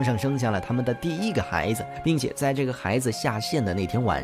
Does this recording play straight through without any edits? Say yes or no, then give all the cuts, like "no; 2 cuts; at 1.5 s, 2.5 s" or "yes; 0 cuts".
no; 1 cut; at 1.9 s